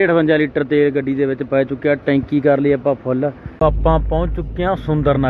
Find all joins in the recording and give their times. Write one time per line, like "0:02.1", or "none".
0:03.4